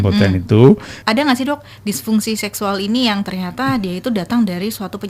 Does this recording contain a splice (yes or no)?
yes